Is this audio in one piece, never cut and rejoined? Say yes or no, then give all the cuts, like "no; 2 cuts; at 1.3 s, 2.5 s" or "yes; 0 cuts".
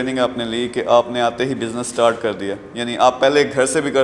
yes; 0 cuts